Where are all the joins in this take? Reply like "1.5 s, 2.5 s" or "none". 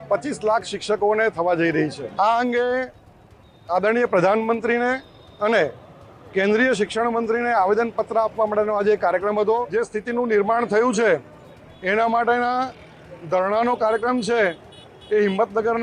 2.0 s, 9.7 s